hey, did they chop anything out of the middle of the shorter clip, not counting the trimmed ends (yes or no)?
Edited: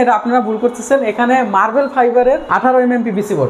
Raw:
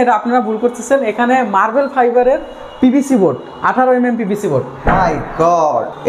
yes